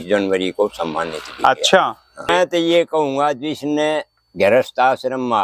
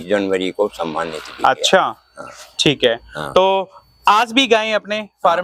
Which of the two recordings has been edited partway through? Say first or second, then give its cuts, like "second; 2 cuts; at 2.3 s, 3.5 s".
first; 1 cut; at 2.3 s